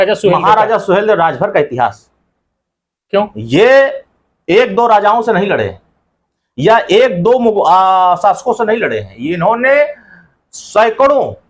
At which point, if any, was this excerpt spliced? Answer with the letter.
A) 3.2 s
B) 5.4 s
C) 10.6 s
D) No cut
D